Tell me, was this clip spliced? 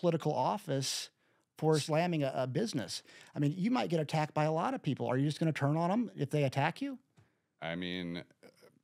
yes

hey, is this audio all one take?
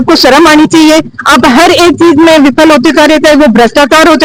yes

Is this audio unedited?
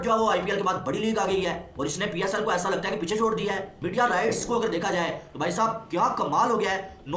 yes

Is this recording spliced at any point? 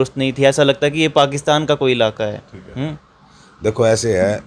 no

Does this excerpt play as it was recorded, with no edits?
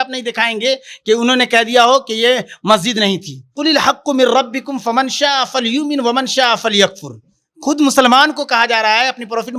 no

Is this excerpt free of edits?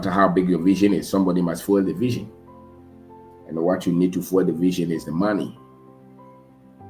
no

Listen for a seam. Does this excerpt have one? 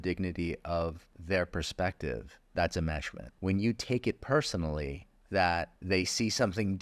yes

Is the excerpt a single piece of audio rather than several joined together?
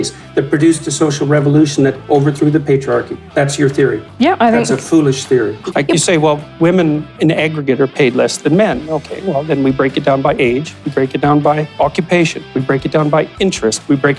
no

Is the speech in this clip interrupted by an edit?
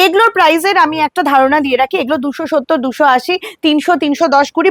no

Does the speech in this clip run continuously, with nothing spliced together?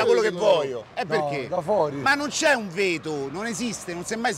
yes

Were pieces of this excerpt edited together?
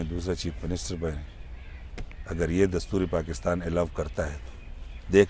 no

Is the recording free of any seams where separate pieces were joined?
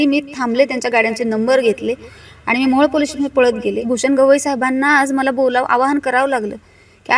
no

